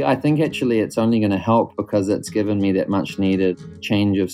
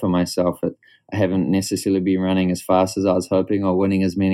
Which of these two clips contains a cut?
first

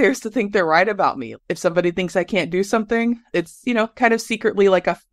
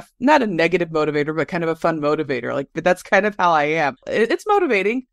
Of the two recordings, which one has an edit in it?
first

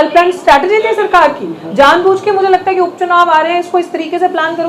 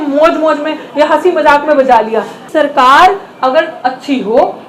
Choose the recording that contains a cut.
second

